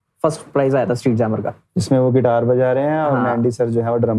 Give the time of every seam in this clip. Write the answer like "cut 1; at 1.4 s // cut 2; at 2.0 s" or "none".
none